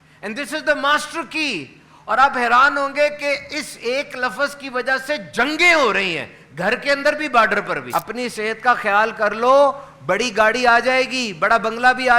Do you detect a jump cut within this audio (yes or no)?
yes